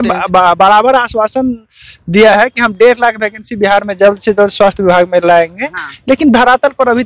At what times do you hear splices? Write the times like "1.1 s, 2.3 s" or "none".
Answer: none